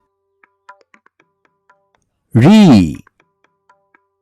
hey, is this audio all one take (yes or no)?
yes